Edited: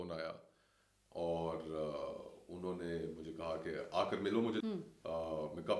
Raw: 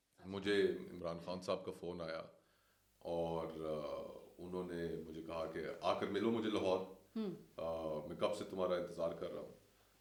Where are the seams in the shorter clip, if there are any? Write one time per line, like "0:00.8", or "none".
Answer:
0:04.6